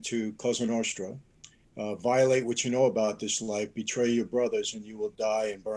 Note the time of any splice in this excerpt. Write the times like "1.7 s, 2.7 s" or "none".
none